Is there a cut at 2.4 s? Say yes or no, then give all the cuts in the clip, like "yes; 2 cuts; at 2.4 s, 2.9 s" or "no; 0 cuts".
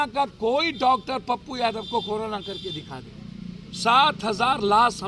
no; 0 cuts